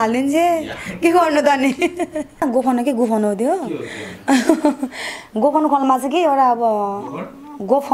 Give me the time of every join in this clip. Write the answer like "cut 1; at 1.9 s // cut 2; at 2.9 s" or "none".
cut 1; at 2.4 s